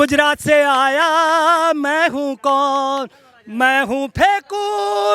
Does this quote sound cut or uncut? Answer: uncut